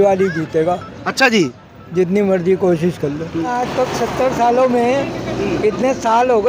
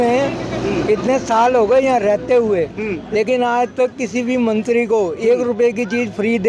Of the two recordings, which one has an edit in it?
first; 1 cut; at 3.5 s

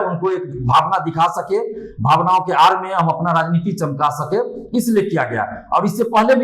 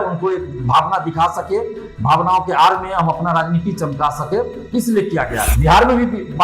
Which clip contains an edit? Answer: second; 1 cut; at 5.5 s

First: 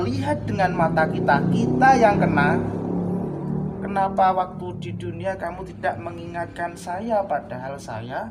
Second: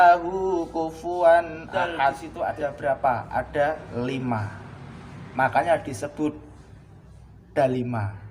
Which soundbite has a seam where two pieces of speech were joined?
second; 1 cut; at 2.3 s

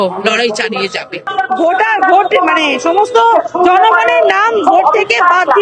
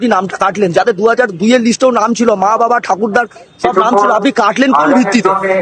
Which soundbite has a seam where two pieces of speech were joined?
first; 1 cut; at 1.3 s

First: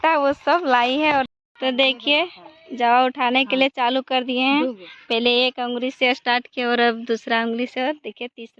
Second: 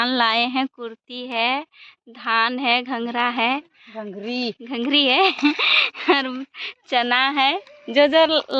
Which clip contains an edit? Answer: first; 1 cut; at 1.3 s

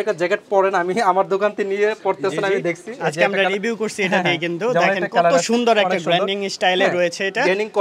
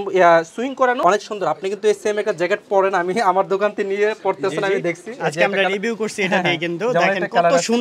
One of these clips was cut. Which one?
second; 1 cut; at 1.0 s

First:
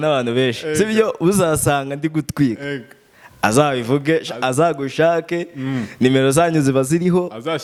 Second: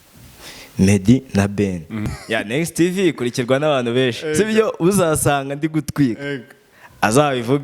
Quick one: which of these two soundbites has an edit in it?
second; 1 cut; at 2.1 s

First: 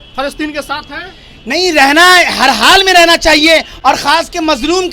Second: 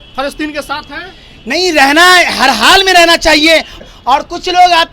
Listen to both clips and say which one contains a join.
second; 1 cut; at 3.8 s

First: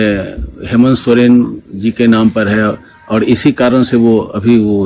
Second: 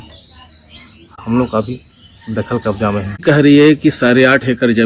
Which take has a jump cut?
second; 2 cuts; at 1.2 s, 3.2 s

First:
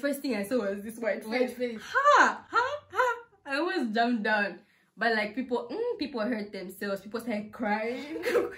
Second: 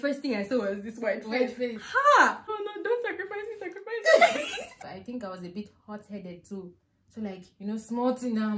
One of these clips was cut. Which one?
second; 2 cuts; at 2.5 s, 4.9 s

